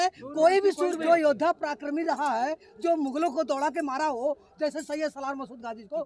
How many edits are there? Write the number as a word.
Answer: one